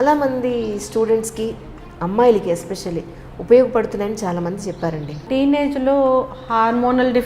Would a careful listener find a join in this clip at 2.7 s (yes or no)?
no